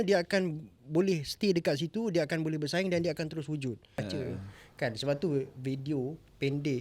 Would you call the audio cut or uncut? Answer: cut